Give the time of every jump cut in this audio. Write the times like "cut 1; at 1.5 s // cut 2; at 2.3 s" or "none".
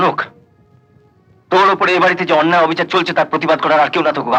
none